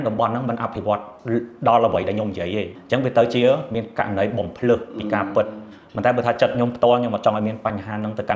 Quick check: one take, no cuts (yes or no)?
no